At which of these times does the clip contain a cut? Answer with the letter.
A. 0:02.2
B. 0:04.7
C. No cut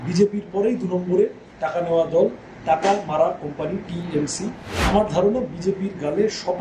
B